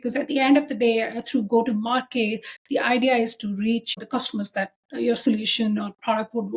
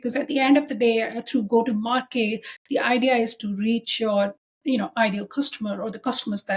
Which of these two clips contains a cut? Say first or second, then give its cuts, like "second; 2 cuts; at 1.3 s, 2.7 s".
first; 1 cut; at 3.9 s